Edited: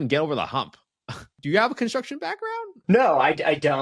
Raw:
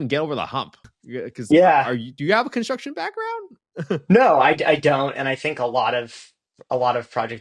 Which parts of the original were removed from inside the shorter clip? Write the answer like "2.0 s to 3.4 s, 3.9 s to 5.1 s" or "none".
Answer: 1.3 s to 2.0 s, 3.6 s to 4.0 s